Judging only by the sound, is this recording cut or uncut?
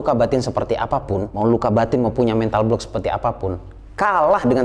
cut